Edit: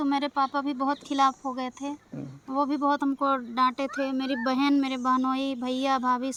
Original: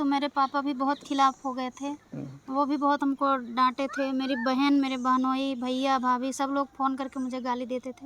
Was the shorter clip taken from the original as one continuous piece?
yes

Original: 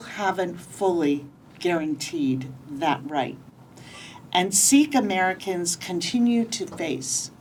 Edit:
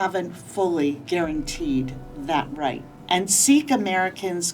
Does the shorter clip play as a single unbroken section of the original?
no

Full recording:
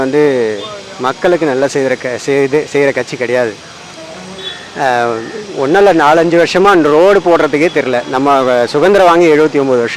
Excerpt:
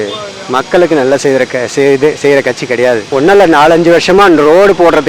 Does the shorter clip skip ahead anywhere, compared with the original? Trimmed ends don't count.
yes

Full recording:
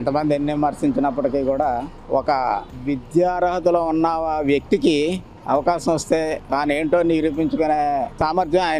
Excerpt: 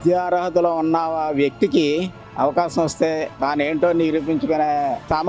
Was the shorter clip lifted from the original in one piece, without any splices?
yes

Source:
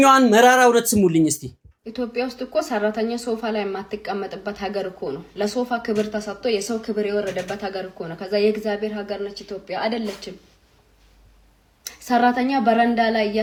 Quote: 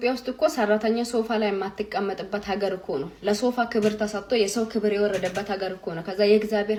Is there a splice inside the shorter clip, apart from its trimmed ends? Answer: no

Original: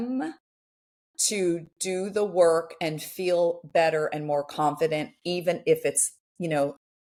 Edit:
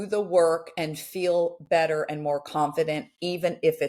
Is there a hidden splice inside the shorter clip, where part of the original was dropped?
no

